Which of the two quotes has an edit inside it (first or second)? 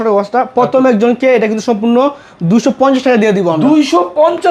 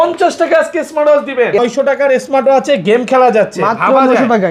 second